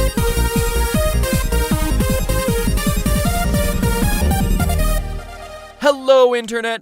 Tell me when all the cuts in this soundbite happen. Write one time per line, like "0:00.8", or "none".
0:02.6